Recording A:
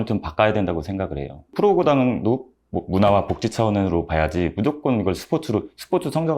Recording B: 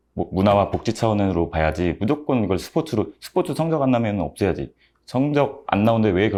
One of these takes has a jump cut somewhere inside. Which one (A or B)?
A